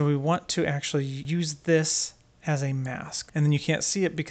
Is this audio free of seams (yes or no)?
no